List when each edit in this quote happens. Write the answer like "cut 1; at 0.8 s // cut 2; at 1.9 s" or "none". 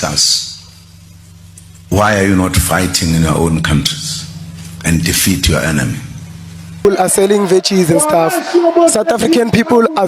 cut 1; at 6.9 s